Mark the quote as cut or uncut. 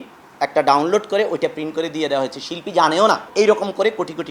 cut